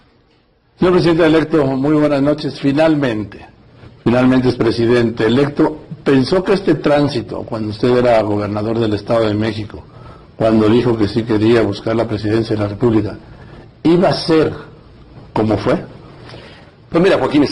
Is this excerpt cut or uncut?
uncut